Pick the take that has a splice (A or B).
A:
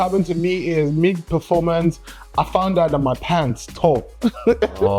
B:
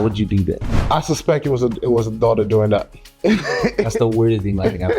B